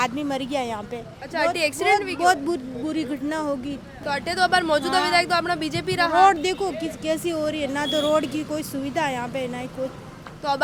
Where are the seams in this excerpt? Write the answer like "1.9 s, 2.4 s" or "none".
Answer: none